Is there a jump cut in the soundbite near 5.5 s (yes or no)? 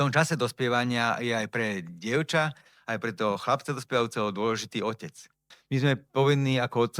yes